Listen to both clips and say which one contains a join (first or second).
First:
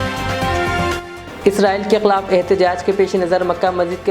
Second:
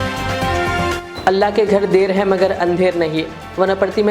second